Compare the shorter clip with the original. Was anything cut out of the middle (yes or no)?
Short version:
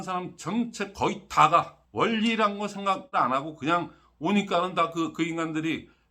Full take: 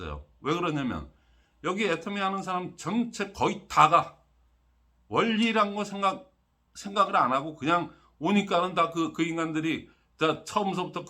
yes